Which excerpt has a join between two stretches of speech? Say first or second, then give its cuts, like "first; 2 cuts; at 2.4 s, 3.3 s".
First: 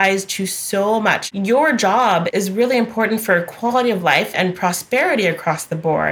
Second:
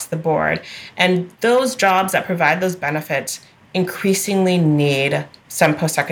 first; 3 cuts; at 1.2 s, 2.3 s, 4.3 s